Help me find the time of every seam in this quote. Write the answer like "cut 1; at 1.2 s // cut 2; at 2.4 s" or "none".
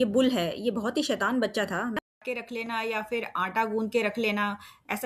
cut 1; at 2.0 s